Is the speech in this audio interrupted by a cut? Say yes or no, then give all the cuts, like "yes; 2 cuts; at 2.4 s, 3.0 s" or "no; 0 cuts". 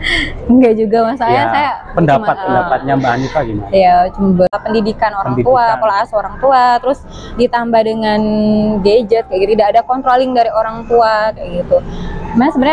yes; 1 cut; at 4.5 s